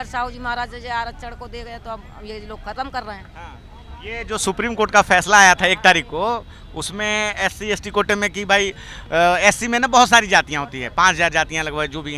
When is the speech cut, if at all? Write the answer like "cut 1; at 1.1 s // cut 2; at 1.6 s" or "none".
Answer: none